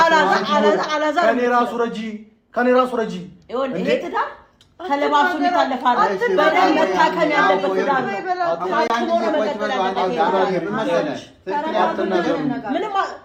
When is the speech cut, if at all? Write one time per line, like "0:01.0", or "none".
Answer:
none